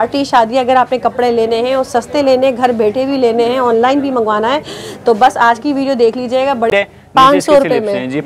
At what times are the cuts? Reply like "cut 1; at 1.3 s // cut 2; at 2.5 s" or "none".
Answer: cut 1; at 6.7 s

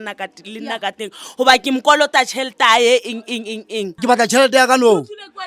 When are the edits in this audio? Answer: cut 1; at 3.9 s

